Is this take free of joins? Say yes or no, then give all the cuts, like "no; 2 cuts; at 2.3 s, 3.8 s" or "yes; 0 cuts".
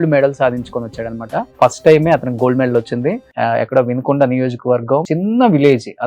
no; 3 cuts; at 1.5 s, 3.3 s, 5.1 s